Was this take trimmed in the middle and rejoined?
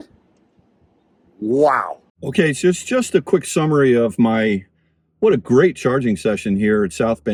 no; 0 cuts

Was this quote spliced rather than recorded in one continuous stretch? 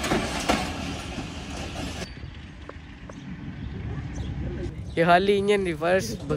no; 0 cuts

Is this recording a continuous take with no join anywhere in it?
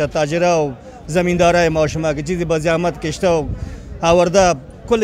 yes; 0 cuts

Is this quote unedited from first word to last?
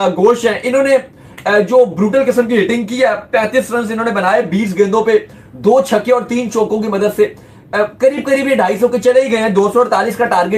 yes; 0 cuts

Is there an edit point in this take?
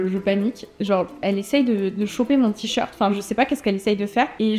no; 0 cuts

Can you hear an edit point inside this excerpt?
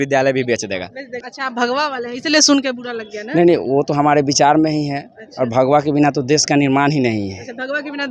yes; 1 cut; at 1.2 s

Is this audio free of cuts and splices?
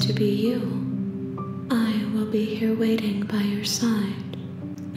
yes; 0 cuts

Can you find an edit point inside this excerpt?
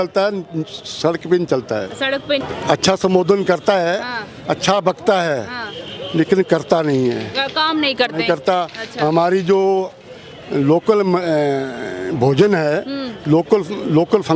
yes; 1 cut; at 2.4 s

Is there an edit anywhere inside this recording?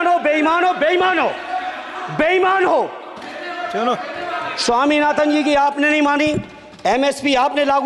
no; 0 cuts

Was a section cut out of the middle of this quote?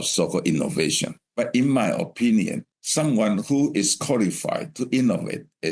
yes; 2 cuts; at 1.2 s, 2.6 s

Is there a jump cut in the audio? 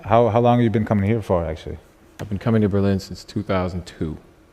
no; 0 cuts

